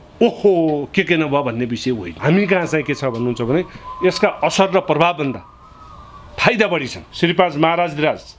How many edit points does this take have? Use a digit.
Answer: 2